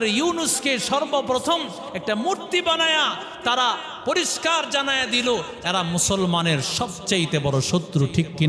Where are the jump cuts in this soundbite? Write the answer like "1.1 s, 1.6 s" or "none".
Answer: none